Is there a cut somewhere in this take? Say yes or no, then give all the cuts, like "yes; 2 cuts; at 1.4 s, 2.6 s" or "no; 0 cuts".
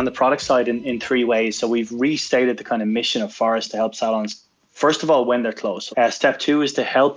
yes; 1 cut; at 5.8 s